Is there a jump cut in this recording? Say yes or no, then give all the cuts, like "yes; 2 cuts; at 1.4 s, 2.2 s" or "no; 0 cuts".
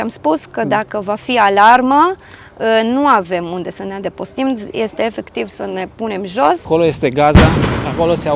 yes; 1 cut; at 6.6 s